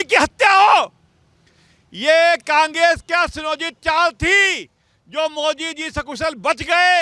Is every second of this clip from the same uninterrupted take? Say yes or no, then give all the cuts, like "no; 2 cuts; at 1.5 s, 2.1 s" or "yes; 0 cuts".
yes; 0 cuts